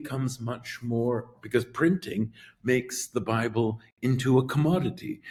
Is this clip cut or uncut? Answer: uncut